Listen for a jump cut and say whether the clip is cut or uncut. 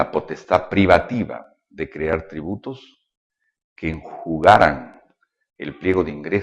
uncut